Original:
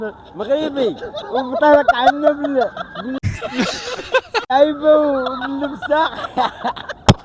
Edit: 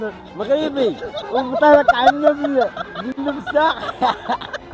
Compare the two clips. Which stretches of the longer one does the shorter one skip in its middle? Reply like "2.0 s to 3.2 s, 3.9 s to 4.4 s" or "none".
3.2 s to 5.5 s